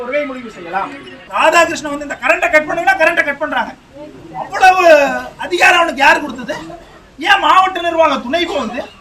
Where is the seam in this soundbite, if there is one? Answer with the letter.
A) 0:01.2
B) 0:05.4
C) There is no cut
A